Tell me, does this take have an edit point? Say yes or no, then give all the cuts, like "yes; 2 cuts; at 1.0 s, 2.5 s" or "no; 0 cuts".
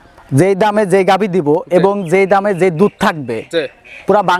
no; 0 cuts